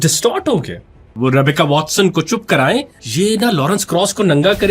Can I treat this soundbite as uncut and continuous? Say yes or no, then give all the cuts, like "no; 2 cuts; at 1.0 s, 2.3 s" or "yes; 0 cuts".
no; 2 cuts; at 1.1 s, 3.0 s